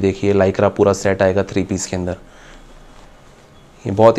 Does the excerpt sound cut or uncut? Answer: uncut